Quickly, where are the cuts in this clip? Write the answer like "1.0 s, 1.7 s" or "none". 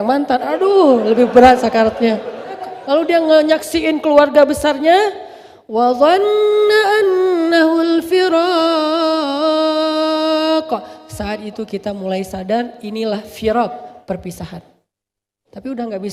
2.7 s